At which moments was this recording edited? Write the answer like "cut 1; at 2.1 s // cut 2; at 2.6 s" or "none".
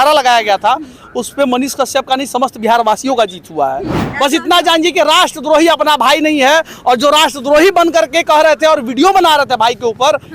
cut 1; at 4.0 s